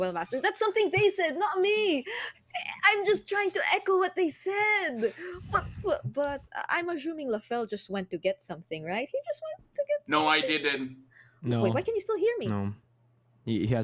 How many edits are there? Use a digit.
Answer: 0